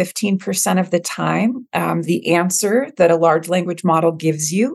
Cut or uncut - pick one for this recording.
uncut